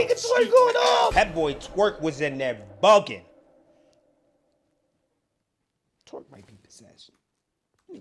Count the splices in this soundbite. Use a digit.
1